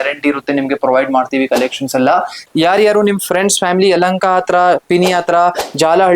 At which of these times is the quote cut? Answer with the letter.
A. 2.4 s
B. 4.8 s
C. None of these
A